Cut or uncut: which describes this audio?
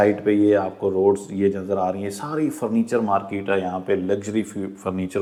uncut